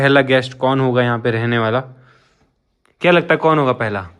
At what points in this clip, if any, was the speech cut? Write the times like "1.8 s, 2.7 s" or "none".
none